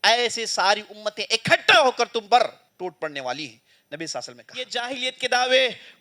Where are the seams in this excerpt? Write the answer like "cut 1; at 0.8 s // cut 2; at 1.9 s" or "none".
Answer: cut 1; at 2.6 s // cut 2; at 4.8 s